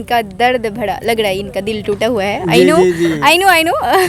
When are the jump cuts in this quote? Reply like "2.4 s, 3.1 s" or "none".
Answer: none